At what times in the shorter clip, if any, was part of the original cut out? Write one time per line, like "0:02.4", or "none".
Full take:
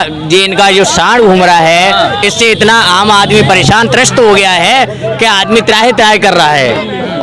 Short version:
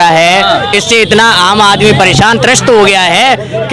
none